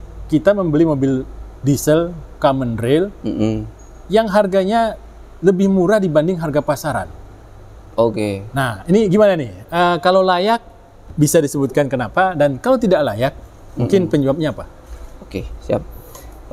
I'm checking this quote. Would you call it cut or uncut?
uncut